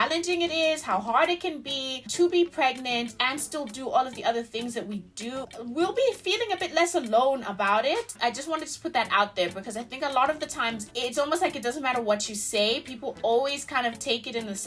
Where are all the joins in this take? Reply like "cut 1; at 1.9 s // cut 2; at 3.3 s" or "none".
cut 1; at 5.4 s // cut 2; at 8.1 s